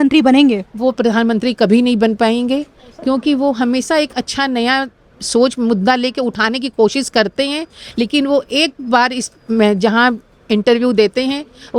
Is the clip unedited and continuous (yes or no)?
yes